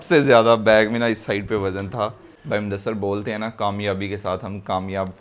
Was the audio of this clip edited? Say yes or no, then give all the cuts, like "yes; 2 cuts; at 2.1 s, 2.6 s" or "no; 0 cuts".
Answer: yes; 1 cut; at 2.3 s